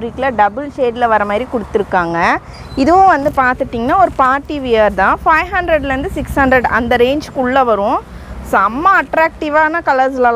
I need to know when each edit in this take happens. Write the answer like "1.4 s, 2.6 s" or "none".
none